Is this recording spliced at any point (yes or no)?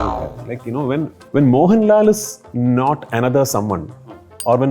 yes